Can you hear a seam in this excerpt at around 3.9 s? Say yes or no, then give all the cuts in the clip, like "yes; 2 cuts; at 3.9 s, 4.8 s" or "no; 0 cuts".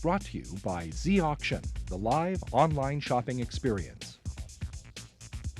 yes; 1 cut; at 3.9 s